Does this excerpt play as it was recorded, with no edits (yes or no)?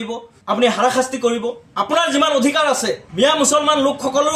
no